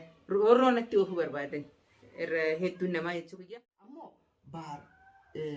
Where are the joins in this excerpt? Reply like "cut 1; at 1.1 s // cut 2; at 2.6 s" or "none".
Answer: cut 1; at 3.4 s